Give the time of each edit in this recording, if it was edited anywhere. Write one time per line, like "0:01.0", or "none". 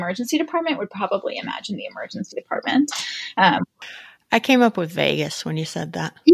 0:03.9